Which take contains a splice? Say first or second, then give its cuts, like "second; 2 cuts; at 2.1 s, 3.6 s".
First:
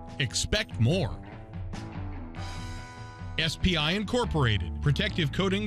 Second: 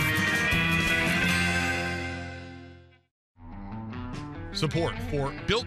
second; 2 cuts; at 3.1 s, 4.6 s